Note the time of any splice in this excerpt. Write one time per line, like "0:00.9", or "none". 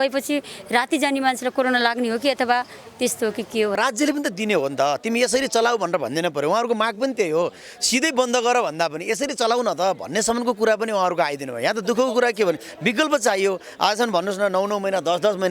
0:03.7